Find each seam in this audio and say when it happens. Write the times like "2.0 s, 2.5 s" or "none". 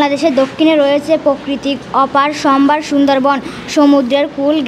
none